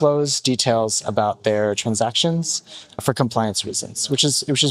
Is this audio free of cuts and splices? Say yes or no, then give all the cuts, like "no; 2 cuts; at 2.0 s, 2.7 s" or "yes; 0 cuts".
no; 1 cut; at 3.0 s